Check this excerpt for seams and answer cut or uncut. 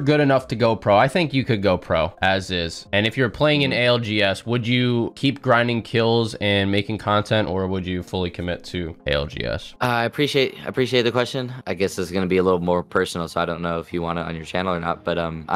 uncut